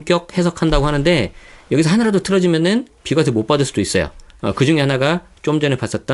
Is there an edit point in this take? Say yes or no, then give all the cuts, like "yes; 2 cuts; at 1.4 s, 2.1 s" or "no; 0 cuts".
no; 0 cuts